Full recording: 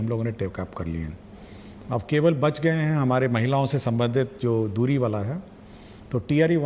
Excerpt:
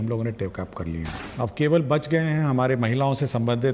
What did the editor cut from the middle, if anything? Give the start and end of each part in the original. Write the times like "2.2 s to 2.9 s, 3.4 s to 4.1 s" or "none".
1.2 s to 1.7 s